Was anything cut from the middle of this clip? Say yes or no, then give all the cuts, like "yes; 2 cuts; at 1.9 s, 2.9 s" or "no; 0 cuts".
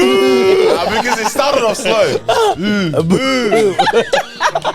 no; 0 cuts